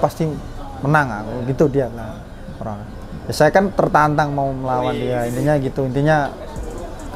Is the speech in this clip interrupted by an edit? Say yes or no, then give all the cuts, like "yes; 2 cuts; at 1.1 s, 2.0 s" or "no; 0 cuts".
no; 0 cuts